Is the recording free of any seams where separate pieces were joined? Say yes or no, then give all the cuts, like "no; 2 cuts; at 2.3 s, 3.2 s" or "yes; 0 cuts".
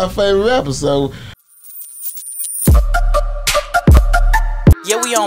no; 1 cut; at 1.5 s